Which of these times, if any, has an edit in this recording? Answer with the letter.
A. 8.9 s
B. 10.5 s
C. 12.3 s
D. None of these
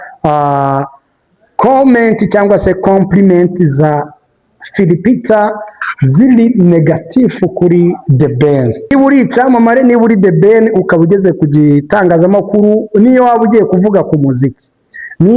A